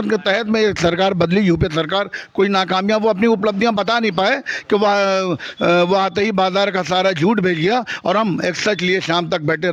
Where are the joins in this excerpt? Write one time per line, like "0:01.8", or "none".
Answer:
none